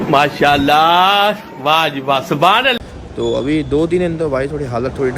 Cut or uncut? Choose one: uncut